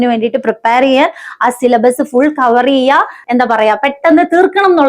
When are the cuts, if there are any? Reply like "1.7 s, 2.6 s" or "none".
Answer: 3.2 s